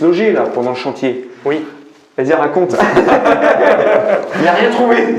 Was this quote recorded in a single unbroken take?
yes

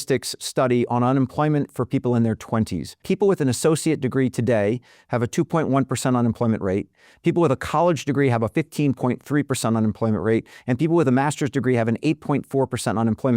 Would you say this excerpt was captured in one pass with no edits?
no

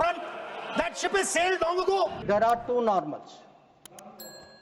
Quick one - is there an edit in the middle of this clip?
yes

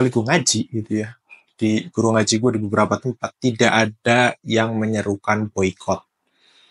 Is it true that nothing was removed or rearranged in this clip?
yes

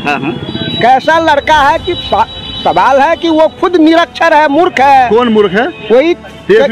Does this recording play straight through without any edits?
yes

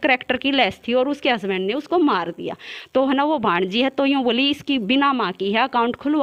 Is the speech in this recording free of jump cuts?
yes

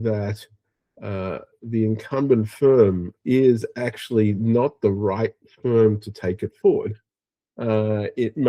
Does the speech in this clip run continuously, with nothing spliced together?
no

